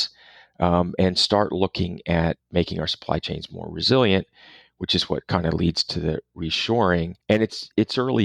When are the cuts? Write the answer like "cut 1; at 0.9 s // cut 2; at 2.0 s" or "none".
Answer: cut 1; at 7.1 s